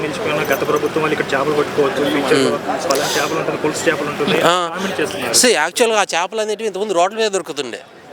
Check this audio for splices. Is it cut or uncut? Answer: uncut